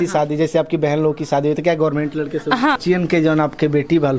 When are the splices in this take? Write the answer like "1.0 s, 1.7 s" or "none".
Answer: 2.8 s

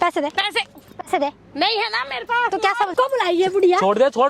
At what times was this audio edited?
2.9 s

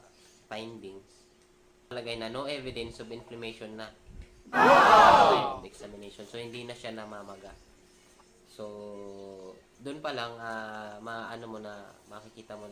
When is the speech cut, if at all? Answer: 1.9 s

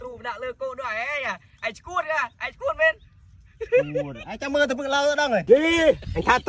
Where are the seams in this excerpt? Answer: 5.4 s

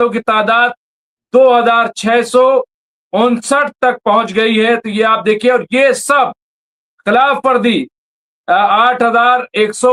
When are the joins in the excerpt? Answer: none

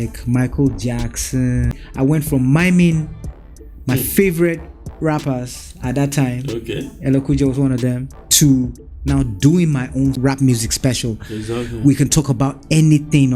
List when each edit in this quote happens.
1.8 s, 10.2 s

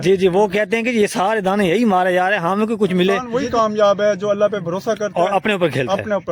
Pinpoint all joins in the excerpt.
3.3 s

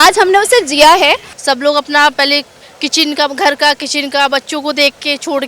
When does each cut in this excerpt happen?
1.3 s

